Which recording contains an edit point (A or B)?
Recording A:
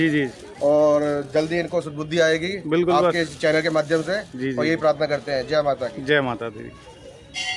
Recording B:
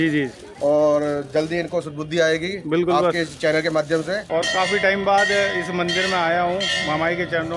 B